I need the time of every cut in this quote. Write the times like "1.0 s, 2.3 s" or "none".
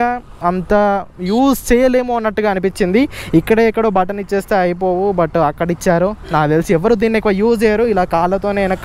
none